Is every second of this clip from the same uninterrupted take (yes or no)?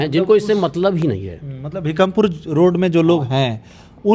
yes